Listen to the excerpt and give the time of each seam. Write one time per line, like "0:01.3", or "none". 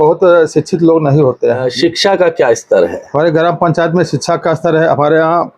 0:01.6